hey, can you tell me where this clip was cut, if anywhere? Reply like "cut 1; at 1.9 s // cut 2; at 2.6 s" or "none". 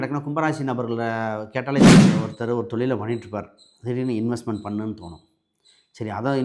cut 1; at 1.8 s // cut 2; at 2.3 s